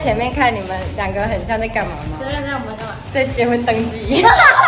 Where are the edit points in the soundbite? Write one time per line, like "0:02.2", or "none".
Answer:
none